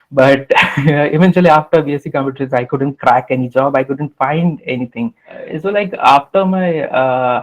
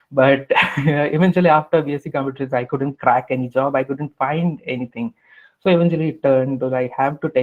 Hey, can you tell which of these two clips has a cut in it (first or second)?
first